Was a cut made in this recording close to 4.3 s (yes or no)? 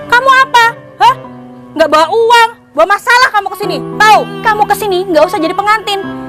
yes